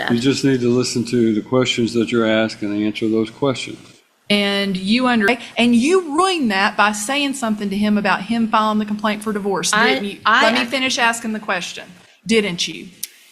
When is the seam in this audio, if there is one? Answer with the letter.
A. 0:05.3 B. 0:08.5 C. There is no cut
A